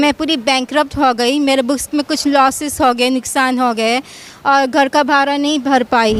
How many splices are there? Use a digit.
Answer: 0